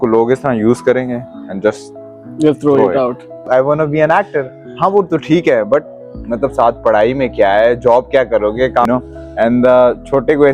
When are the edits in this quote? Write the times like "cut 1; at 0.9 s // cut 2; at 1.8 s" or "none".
cut 1; at 3.4 s // cut 2; at 8.8 s